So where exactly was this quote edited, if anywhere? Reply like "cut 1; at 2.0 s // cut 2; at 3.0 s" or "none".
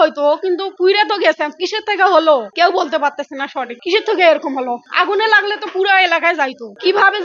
none